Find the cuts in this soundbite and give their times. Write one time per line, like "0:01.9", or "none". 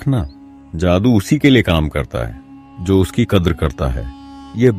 none